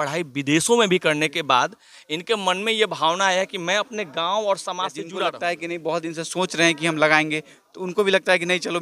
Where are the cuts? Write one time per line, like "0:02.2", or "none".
0:05.0